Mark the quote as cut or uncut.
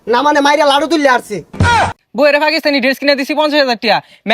cut